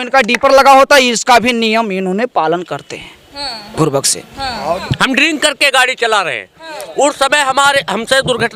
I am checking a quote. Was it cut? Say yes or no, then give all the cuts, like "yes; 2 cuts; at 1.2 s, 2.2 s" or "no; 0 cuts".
no; 0 cuts